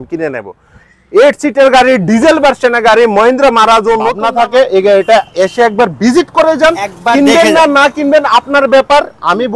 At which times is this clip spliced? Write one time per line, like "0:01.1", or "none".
0:04.2